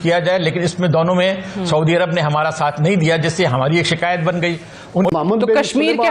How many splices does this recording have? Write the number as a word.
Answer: one